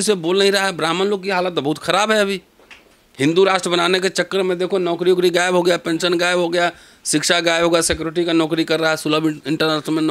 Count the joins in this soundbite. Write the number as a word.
zero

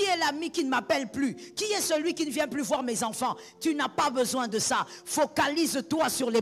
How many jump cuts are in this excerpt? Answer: zero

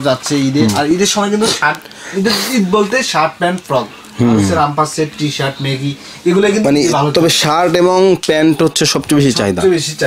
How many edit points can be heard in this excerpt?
zero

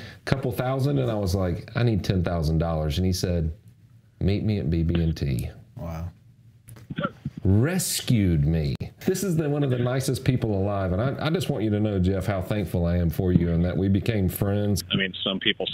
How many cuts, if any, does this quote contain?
two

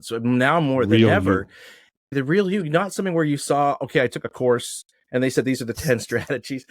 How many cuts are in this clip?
one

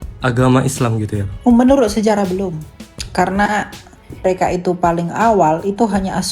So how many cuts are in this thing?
two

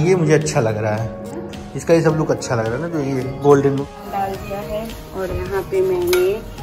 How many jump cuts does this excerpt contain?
one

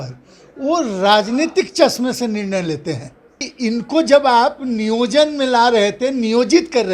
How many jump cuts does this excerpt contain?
one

